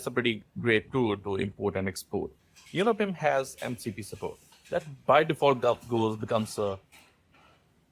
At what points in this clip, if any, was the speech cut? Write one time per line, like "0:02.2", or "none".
0:02.3